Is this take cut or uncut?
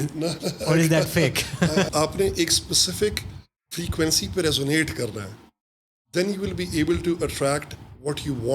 cut